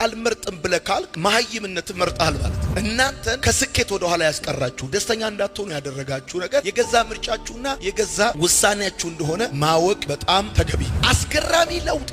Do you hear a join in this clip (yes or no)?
yes